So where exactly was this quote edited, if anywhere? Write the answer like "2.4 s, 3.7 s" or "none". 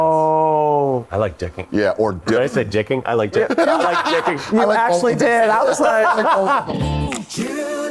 6.7 s